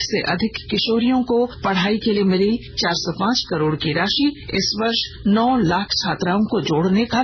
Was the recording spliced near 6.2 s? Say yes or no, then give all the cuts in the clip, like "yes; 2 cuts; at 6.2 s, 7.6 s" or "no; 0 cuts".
no; 3 cuts; at 1.6 s, 2.7 s, 4.9 s